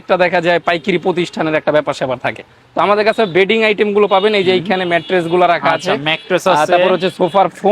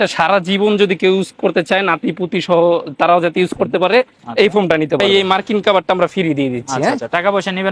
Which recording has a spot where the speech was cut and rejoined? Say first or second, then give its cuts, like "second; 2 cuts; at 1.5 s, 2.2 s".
second; 1 cut; at 5.0 s